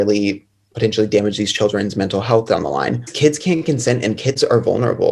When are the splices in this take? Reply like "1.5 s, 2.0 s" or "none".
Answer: 3.1 s